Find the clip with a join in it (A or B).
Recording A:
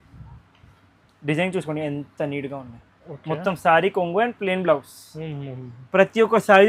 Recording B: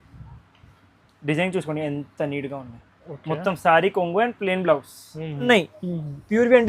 B